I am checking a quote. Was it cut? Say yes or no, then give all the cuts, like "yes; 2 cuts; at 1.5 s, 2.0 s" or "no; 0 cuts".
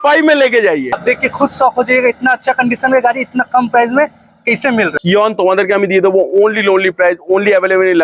yes; 2 cuts; at 1.0 s, 4.9 s